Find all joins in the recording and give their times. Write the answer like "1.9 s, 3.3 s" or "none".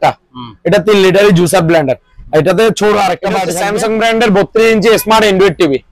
3.5 s